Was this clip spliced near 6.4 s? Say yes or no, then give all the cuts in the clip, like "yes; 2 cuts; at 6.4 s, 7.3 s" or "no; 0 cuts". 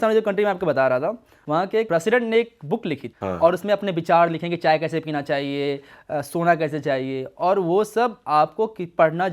no; 2 cuts; at 1.6 s, 3.1 s